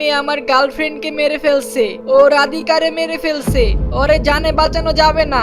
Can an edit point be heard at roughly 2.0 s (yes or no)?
yes